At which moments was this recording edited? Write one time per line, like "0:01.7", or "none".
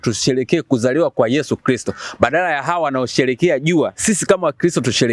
none